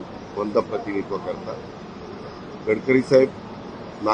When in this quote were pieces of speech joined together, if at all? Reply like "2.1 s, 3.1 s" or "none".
none